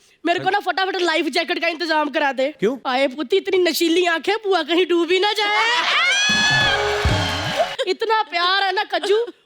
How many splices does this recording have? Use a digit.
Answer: 2